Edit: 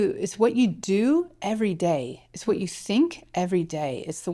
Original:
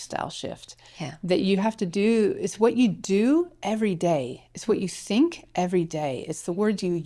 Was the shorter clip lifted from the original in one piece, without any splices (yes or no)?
yes